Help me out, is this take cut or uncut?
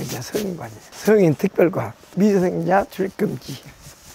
uncut